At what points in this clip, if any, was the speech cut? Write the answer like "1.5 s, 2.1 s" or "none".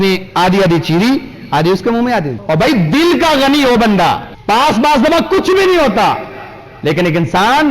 2.4 s, 4.3 s